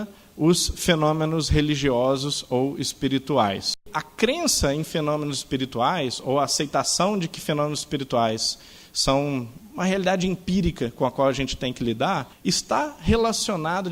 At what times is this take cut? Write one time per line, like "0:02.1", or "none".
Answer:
0:04.0
0:09.6
0:12.3

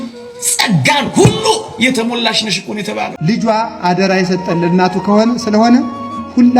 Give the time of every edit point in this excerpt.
0:03.1

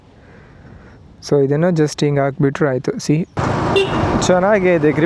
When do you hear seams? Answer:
0:03.4

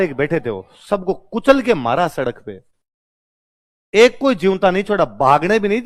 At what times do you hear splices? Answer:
none

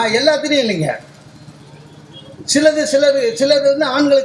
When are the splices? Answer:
none

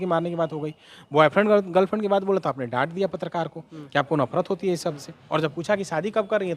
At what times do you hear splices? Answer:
0:05.1

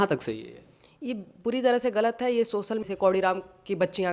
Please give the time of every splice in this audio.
0:02.8

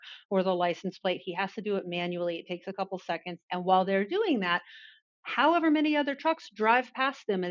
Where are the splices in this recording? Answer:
0:03.3

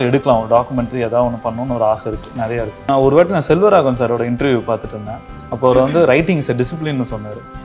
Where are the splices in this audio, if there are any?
0:02.9

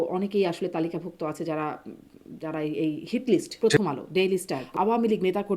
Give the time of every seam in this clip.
0:03.6
0:04.6

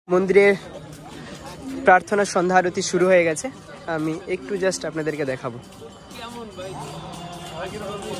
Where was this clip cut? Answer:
none

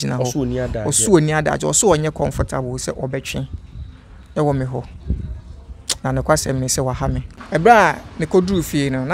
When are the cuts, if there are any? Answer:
0:07.2

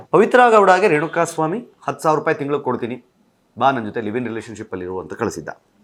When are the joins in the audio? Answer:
none

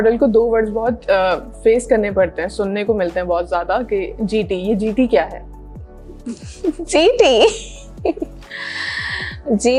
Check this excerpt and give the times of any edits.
none

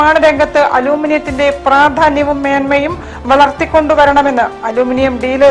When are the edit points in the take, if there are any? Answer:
none

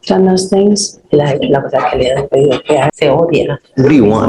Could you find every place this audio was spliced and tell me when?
0:02.9

